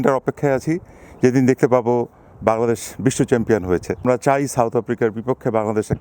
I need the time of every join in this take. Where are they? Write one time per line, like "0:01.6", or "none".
0:04.0